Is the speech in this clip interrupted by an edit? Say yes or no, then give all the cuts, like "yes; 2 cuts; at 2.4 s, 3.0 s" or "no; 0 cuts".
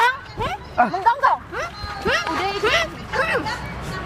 no; 0 cuts